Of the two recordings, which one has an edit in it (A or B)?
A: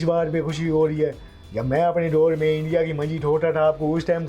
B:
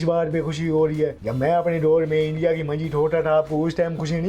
B